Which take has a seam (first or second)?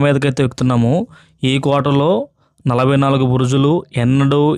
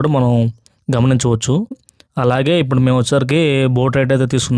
second